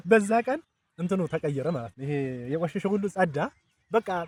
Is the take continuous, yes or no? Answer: yes